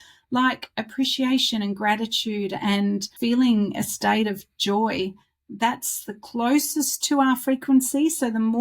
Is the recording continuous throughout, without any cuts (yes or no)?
no